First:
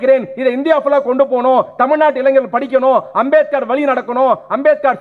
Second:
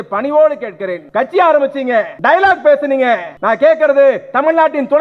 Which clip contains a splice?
second; 3 cuts; at 0.9 s, 2.1 s, 3.3 s

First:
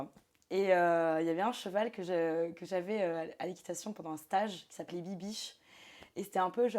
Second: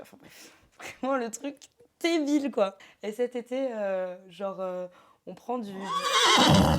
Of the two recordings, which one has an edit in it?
second; 2 cuts; at 2.8 s, 5.8 s

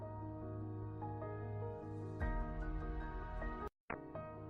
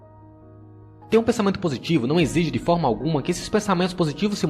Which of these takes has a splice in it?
second; 1 cut; at 1.1 s

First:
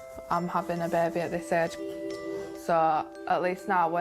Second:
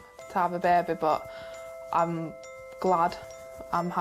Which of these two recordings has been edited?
first; 1 cut; at 2.5 s

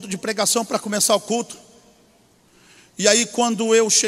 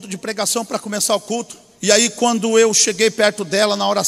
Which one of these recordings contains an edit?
second; 1 cut; at 1.6 s

